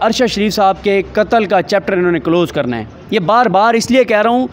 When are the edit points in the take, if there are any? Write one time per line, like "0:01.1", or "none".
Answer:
none

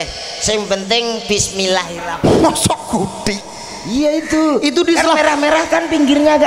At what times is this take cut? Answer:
0:02.0

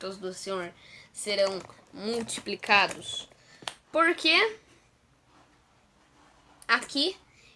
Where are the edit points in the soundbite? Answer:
none

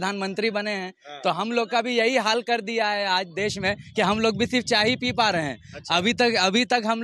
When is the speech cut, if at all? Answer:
none

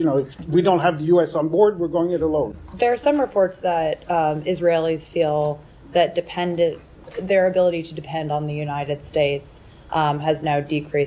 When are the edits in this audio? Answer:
0:02.6

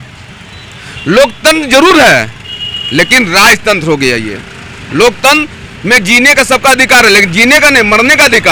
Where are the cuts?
none

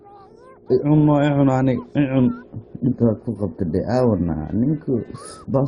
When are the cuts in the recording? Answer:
none

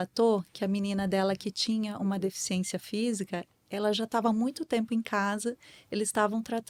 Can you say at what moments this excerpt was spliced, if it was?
none

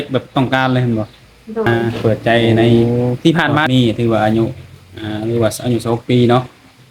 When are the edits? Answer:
0:01.7
0:02.8
0:03.7

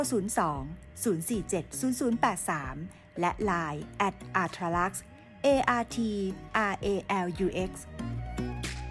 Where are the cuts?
0:07.8

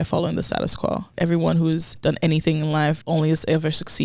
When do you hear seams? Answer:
0:01.1
0:01.9
0:03.0

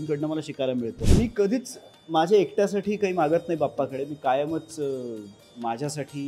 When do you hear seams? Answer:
0:01.0

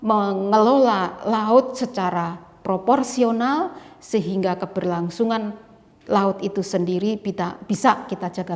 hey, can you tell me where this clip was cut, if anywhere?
none

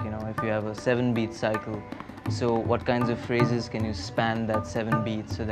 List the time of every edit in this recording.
none

